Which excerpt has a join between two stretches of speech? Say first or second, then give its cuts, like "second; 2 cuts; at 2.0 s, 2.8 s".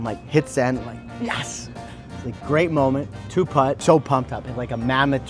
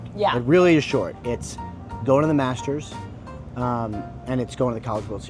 first; 1 cut; at 3.4 s